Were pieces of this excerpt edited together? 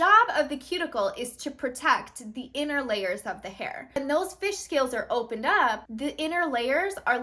yes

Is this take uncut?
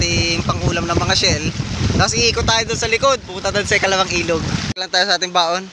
no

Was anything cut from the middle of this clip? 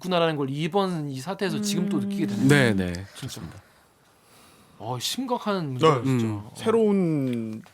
no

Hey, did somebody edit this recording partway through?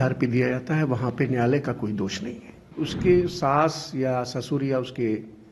yes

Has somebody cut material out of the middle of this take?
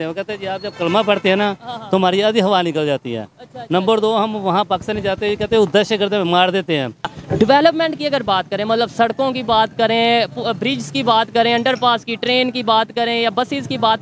yes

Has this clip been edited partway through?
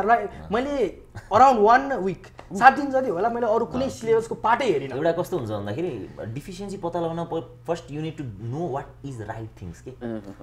no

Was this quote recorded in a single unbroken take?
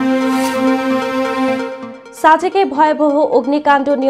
no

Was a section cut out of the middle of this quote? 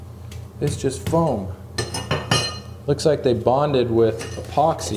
no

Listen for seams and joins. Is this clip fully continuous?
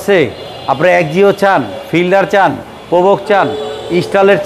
yes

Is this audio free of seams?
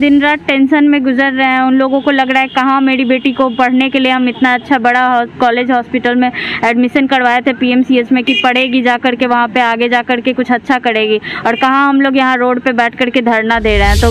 yes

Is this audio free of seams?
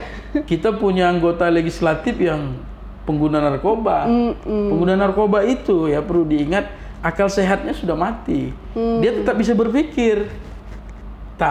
yes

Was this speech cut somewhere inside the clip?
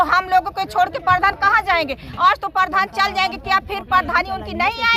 no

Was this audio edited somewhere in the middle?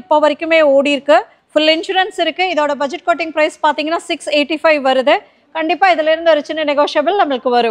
no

